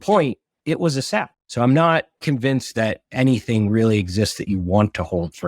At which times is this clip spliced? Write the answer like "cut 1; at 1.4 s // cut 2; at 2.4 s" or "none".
cut 1; at 1.4 s // cut 2; at 2.1 s